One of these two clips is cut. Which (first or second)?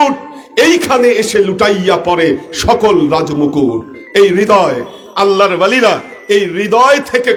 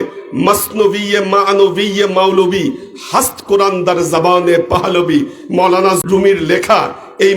second